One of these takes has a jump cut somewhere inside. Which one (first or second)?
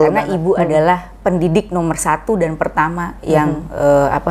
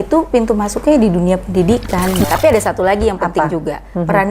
second